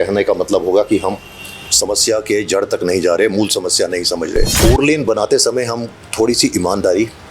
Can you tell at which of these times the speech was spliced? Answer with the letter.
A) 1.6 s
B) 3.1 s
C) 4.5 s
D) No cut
C